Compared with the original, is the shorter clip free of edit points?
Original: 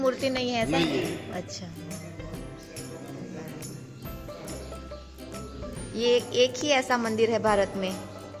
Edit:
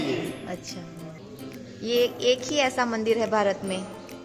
no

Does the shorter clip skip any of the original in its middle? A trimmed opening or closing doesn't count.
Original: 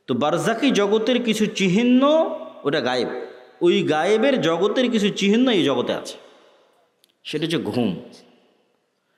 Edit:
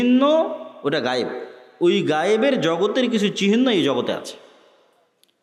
no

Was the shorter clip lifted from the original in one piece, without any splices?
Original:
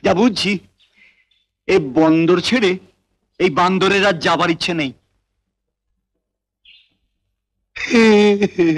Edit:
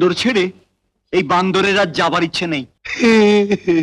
no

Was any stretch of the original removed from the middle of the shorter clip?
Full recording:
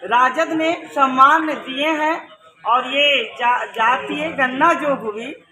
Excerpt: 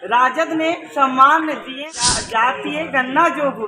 yes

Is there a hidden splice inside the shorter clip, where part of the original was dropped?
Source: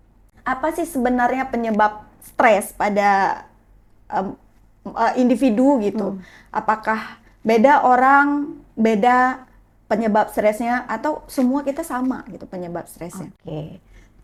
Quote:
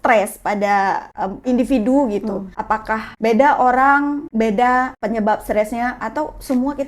yes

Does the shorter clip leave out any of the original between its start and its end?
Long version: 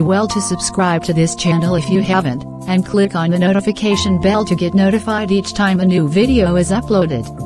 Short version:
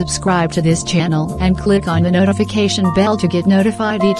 yes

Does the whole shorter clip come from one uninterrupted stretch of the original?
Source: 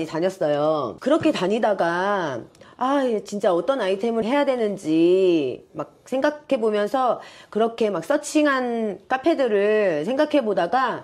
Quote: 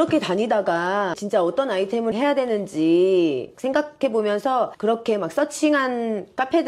no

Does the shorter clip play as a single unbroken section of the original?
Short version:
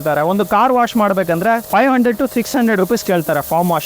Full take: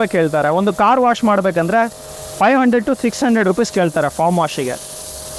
no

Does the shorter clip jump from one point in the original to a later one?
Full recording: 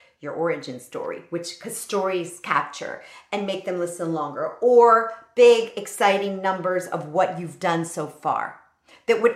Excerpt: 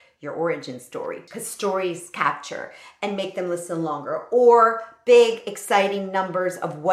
yes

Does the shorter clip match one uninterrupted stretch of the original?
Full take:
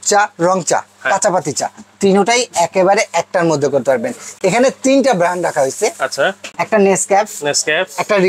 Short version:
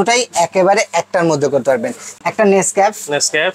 no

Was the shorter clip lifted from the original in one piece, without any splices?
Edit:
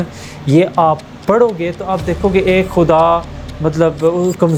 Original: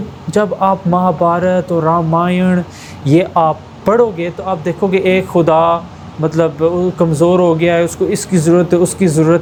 yes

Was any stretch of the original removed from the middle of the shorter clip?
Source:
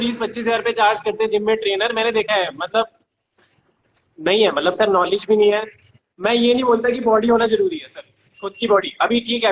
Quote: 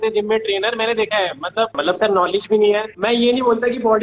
yes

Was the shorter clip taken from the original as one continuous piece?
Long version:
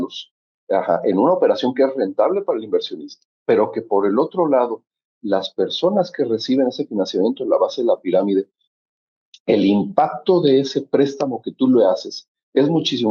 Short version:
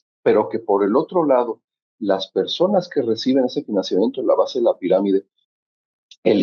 yes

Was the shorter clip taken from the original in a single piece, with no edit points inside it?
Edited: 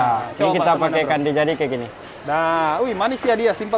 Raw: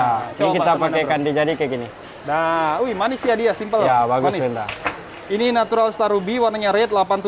yes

